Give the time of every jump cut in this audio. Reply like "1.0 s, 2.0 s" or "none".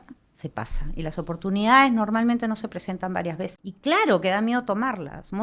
3.7 s